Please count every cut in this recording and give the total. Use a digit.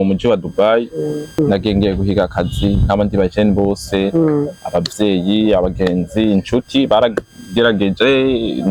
1